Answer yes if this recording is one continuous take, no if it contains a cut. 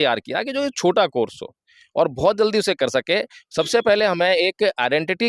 yes